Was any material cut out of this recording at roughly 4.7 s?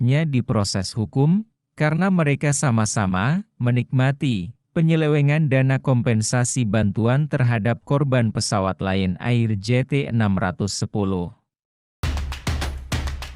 no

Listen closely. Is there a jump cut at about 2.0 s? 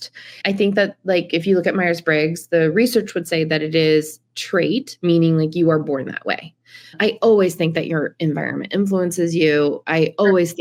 no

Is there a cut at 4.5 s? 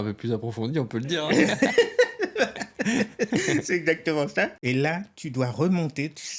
yes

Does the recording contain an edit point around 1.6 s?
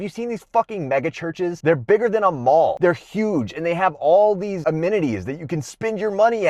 yes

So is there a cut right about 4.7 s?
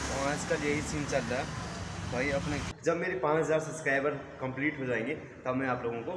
no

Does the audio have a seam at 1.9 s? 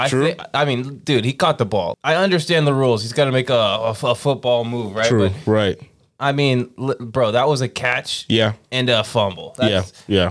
yes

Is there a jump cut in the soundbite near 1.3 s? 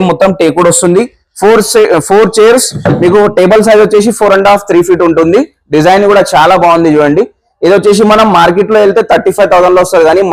no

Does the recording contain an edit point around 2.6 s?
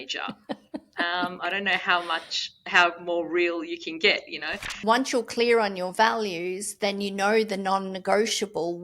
no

